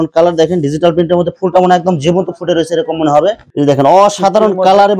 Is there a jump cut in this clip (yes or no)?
yes